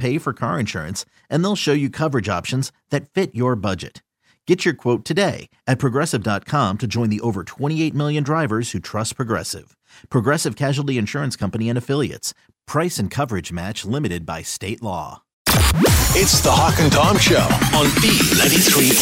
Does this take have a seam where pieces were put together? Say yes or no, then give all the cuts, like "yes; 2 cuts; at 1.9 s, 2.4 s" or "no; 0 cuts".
yes; 1 cut; at 15.4 s